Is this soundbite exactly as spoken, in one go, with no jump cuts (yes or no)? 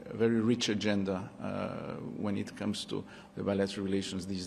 yes